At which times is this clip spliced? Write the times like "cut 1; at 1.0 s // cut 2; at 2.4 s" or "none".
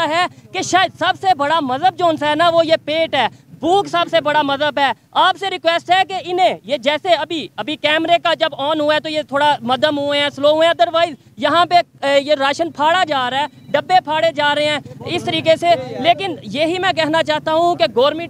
none